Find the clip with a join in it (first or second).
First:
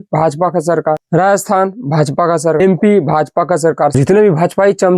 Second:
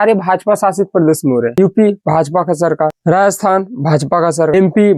first